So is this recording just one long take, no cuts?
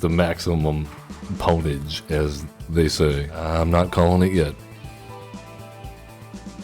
no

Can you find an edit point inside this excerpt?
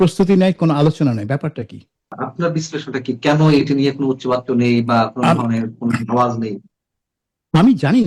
yes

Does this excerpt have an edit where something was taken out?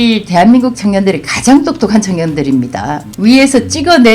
yes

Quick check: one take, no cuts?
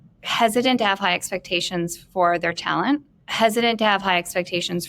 no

